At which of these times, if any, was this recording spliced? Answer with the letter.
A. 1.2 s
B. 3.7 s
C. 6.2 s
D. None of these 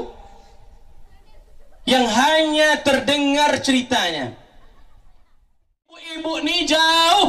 C